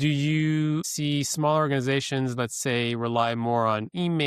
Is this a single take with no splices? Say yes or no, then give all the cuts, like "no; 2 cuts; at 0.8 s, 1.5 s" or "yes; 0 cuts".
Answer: no; 1 cut; at 0.9 s